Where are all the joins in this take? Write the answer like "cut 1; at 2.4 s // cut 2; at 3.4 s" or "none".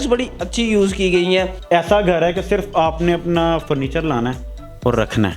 cut 1; at 1.6 s